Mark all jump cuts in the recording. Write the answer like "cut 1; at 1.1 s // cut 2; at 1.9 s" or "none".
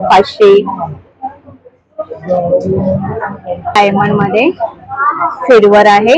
cut 1; at 3.8 s